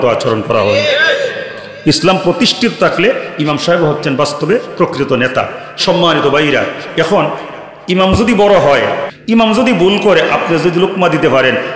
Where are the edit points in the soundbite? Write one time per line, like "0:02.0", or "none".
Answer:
0:09.1